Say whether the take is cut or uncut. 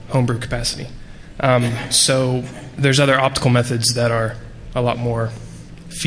uncut